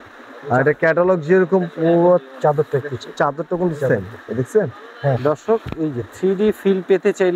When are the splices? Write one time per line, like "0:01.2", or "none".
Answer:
0:05.2